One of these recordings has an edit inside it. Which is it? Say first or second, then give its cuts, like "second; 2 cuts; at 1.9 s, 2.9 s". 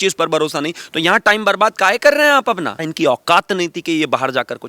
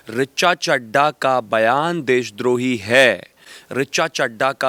first; 1 cut; at 2.8 s